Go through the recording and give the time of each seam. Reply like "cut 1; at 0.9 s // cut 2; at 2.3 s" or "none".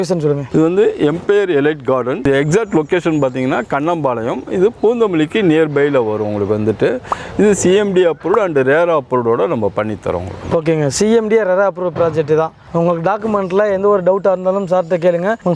none